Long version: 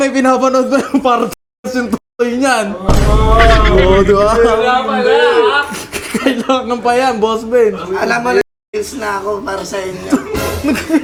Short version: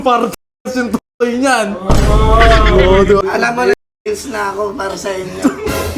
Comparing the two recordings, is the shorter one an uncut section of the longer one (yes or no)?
no